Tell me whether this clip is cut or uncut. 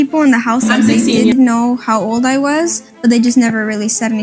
cut